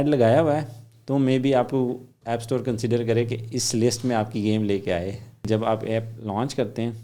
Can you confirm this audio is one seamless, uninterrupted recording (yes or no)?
no